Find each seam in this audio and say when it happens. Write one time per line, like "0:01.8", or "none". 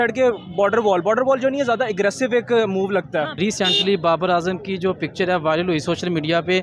0:03.4

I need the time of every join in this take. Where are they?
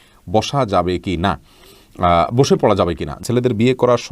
0:03.2

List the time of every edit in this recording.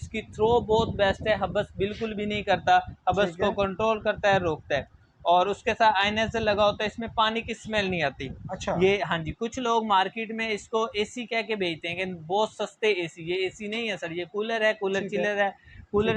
none

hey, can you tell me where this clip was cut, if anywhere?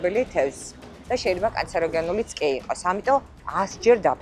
0:01.0

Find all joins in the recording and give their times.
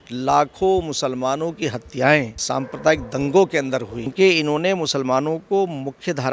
0:02.4
0:04.1

